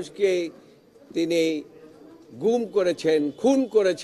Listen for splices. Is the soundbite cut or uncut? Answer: uncut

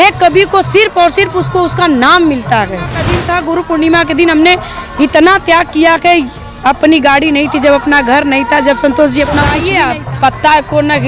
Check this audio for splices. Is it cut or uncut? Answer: cut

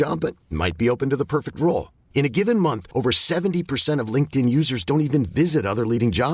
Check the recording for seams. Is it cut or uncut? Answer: uncut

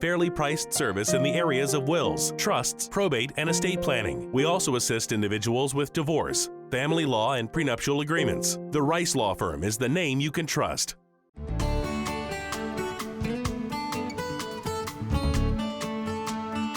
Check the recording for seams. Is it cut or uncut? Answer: cut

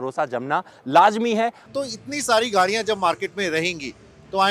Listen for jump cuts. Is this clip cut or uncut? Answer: cut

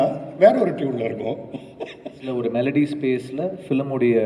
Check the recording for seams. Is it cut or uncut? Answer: cut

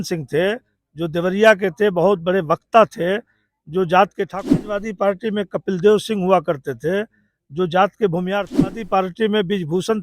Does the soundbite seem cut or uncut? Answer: cut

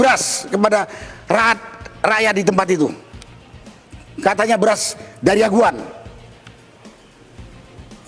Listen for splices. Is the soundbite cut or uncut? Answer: uncut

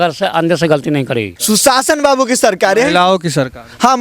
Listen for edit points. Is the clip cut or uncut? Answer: cut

